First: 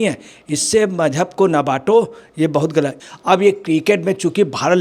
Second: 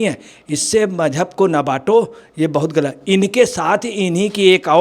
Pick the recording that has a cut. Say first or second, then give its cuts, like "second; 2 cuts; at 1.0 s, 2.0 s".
first; 1 cut; at 3.0 s